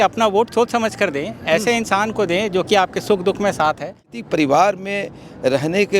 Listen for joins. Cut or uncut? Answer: cut